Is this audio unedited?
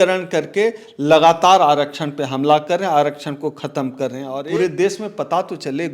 no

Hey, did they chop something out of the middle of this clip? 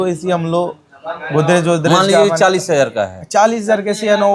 no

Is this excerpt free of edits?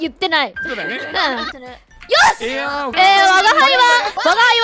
no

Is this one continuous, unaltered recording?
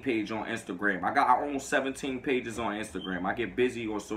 yes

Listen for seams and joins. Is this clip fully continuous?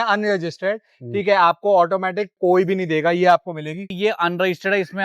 no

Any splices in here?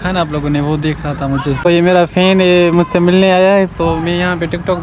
yes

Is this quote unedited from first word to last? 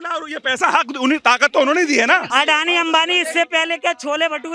no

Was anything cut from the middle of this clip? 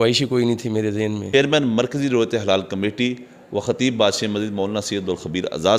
yes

